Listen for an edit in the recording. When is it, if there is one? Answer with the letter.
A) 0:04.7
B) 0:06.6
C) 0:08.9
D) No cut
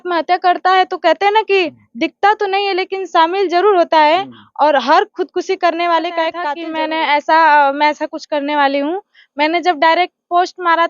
B